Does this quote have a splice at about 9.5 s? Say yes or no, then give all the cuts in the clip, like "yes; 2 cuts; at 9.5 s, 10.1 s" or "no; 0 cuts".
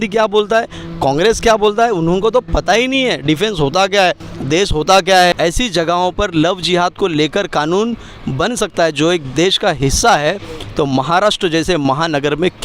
no; 1 cut; at 5.4 s